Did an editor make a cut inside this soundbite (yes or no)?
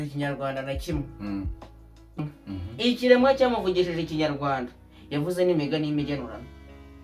yes